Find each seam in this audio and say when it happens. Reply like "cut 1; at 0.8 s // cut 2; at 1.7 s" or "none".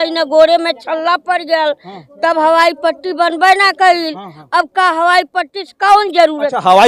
none

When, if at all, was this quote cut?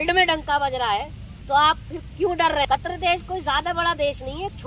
cut 1; at 2.7 s

